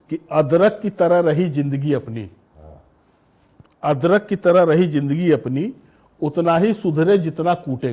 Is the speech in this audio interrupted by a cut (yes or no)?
no